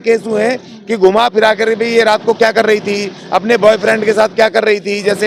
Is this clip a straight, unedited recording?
yes; 0 cuts

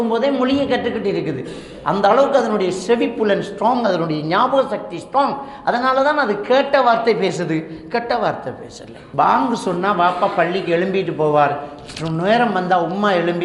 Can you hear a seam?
yes; 1 cut; at 9.0 s

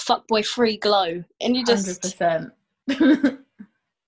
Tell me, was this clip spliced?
no; 0 cuts

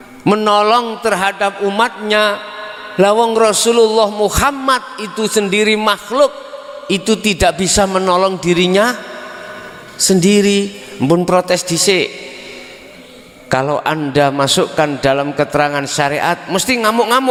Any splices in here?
no; 0 cuts

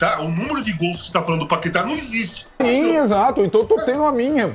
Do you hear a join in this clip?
yes; 1 cut; at 2.6 s

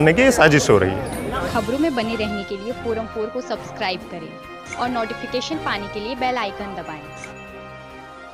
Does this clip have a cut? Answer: no; 0 cuts

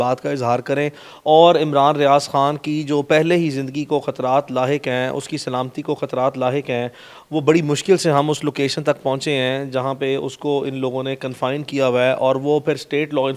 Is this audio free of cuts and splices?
yes; 0 cuts

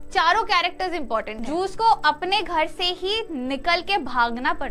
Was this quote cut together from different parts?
yes; 1 cut; at 1.4 s

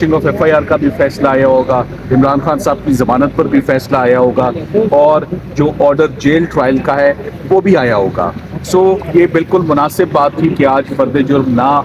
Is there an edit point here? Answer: no; 0 cuts

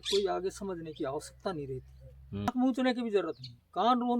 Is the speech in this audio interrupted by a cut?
yes; 1 cut; at 2.5 s

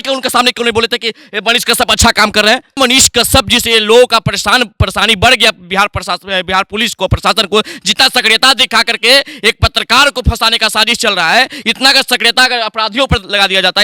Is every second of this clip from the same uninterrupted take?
no; 1 cut; at 2.8 s

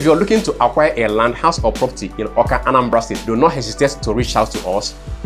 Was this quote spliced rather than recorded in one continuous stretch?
yes; 1 cut; at 3.2 s

